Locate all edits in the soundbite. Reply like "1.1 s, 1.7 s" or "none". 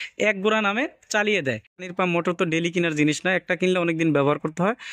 1.9 s